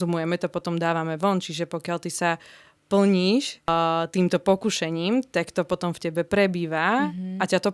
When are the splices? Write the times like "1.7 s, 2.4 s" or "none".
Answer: 3.7 s